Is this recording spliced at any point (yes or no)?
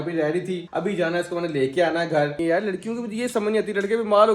yes